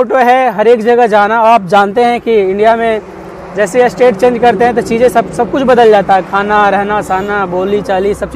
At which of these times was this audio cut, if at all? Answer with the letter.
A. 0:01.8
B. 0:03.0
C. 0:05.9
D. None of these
D